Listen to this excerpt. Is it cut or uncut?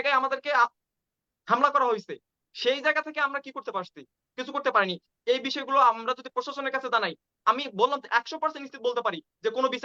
uncut